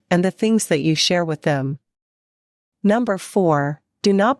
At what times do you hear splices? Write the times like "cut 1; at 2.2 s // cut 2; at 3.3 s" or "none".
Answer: cut 1; at 3.4 s